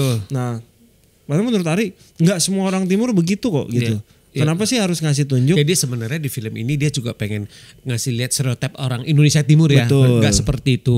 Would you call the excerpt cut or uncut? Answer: uncut